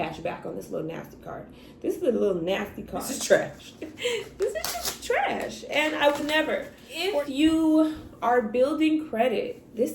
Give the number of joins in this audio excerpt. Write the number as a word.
two